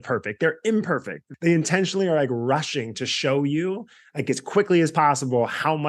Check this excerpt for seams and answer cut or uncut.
cut